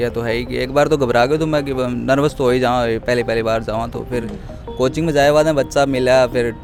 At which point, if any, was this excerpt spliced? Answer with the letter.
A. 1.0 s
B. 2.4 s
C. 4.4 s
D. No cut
D